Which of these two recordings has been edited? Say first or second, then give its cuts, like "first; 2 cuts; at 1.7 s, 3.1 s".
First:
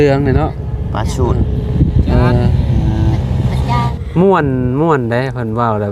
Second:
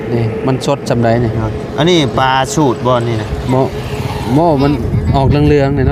first; 1 cut; at 3.9 s